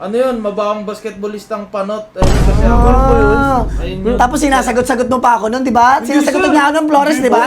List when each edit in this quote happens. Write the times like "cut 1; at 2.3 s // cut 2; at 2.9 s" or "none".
none